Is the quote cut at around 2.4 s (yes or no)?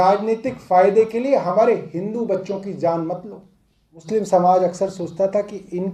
no